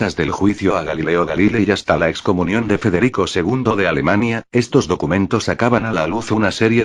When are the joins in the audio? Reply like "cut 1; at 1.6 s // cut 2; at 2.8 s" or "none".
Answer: cut 1; at 4.6 s

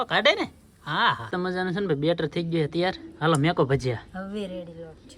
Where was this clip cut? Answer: cut 1; at 1.2 s

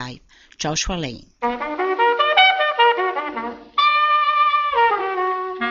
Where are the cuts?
none

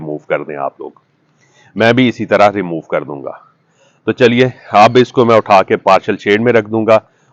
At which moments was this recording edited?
none

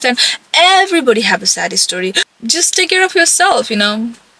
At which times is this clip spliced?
cut 1; at 2.3 s

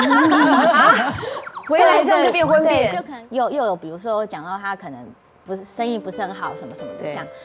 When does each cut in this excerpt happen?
cut 1; at 3.1 s

